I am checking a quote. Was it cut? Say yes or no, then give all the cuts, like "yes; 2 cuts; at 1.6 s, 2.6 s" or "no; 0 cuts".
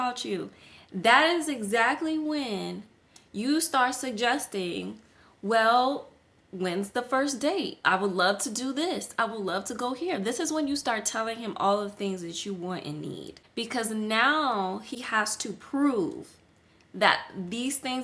yes; 2 cuts; at 13.4 s, 14.9 s